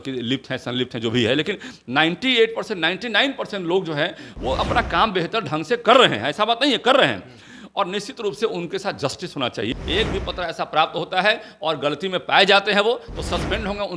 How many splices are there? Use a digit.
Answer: 1